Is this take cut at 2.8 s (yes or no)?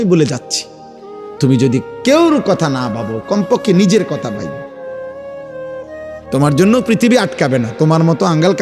no